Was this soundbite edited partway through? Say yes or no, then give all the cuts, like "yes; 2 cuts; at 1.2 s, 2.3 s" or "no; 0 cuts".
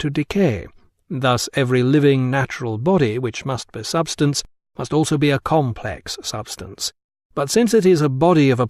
yes; 1 cut; at 1.4 s